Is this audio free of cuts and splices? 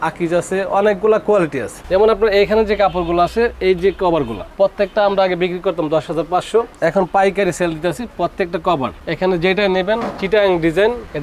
no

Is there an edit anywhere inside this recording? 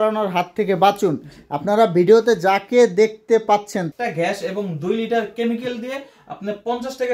yes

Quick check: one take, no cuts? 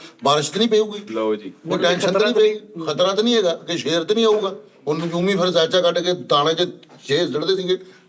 yes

